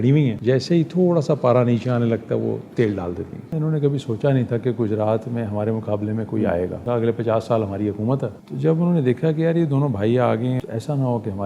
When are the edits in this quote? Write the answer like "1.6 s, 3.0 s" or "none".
3.5 s, 6.8 s, 8.3 s, 10.6 s